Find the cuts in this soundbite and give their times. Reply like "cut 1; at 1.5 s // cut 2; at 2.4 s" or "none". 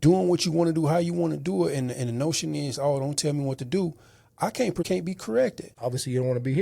cut 1; at 4.9 s // cut 2; at 5.7 s

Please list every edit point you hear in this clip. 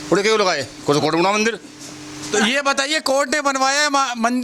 none

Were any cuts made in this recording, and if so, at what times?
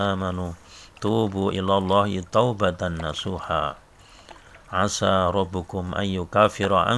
none

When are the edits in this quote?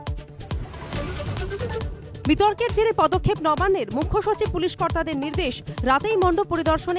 none

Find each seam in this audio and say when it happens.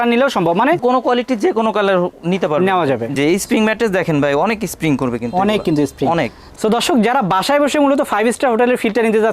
cut 1; at 3.1 s // cut 2; at 6.5 s

